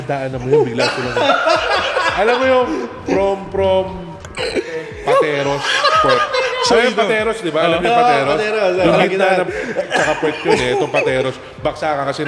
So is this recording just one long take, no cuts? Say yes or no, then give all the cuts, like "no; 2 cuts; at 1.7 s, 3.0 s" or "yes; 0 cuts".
yes; 0 cuts